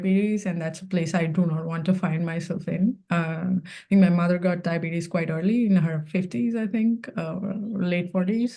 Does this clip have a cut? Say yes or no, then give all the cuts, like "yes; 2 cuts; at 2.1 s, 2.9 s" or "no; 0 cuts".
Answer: no; 0 cuts